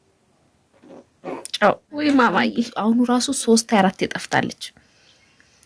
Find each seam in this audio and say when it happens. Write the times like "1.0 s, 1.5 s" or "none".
2.7 s